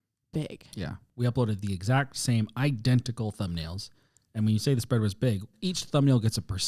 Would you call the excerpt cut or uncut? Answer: cut